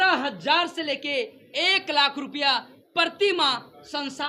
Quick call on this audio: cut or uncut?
uncut